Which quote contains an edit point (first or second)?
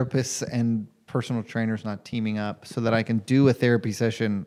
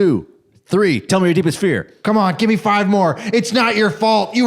second